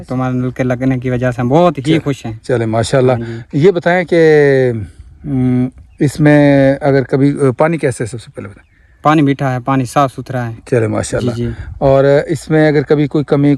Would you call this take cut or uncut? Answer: uncut